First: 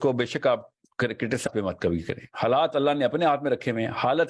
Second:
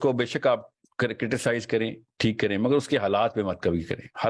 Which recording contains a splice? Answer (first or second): first